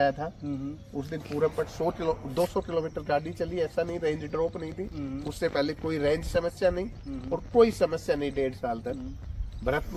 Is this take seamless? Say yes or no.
yes